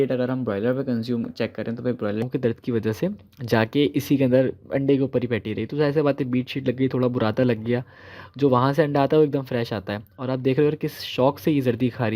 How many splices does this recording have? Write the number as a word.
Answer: one